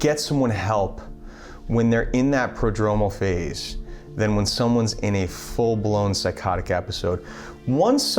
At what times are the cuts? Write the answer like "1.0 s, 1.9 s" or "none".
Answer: none